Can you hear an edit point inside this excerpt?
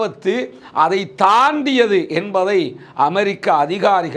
no; 0 cuts

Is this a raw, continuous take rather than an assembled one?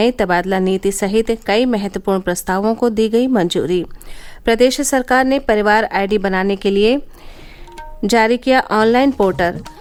yes; 0 cuts

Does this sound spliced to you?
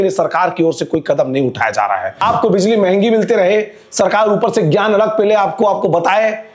yes; 1 cut; at 2.2 s

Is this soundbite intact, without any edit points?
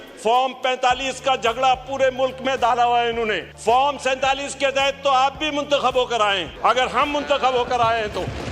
no; 2 cuts; at 3.5 s, 6.5 s

